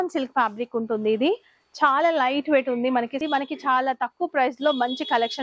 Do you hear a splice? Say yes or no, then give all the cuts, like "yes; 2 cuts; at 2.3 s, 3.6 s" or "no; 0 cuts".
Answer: yes; 1 cut; at 3.2 s